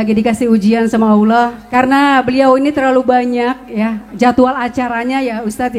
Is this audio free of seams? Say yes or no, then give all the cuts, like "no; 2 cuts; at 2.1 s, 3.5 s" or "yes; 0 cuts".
no; 1 cut; at 1.6 s